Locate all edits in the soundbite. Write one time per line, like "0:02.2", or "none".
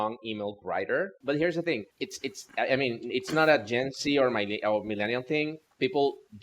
0:01.2
0:01.9